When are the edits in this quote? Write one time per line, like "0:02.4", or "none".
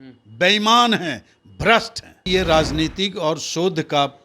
0:02.2

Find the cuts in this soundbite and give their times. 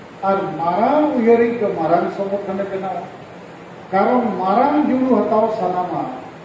none

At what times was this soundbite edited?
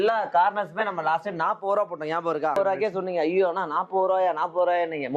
0:02.6

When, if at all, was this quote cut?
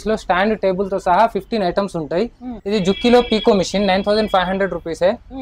0:02.5

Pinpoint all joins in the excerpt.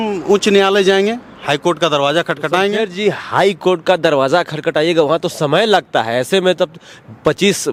none

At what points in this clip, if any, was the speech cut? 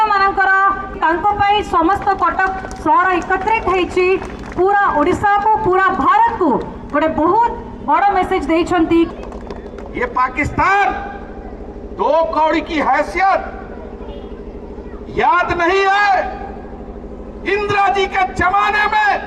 0:01.0
0:09.1

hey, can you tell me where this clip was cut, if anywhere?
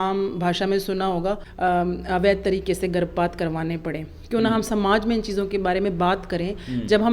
0:01.5

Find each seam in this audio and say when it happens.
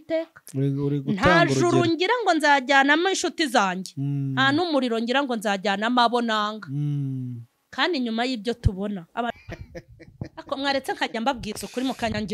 0:09.3

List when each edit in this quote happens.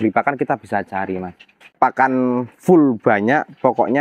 0:01.7

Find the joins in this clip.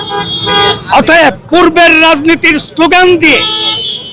0:01.4

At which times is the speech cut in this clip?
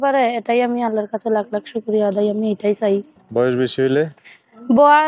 0:03.2

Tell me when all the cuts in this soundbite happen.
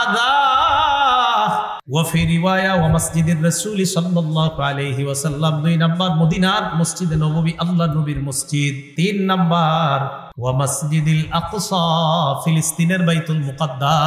0:01.8
0:08.8
0:10.2

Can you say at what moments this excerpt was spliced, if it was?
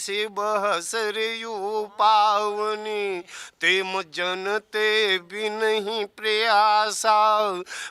none

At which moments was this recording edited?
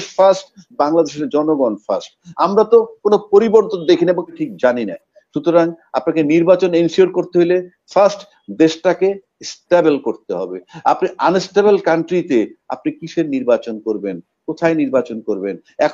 0:04.4

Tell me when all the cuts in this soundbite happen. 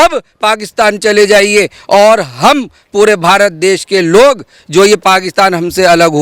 none

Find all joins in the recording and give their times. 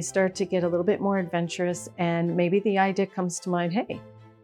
none

